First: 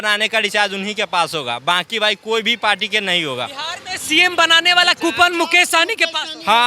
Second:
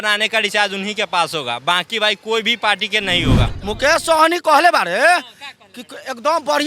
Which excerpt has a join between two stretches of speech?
second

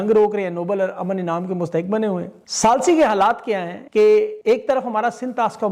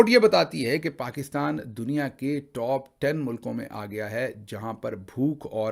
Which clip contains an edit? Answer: first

